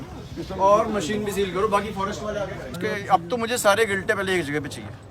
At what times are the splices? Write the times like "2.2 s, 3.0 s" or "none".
2.7 s